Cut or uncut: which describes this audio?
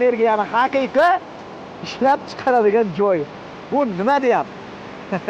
uncut